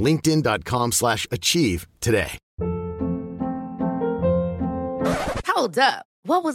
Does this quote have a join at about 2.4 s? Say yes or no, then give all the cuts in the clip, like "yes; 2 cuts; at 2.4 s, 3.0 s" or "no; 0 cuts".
yes; 1 cut; at 2.4 s